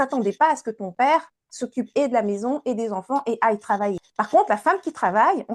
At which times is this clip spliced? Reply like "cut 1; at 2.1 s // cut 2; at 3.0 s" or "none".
cut 1; at 4.0 s